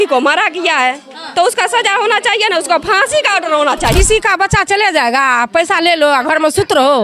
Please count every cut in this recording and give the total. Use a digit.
1